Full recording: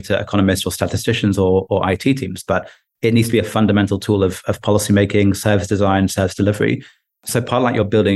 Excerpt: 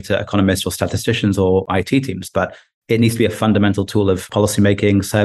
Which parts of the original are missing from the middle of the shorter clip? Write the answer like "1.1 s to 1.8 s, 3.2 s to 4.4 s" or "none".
1.7 s to 1.8 s, 4.4 s to 4.6 s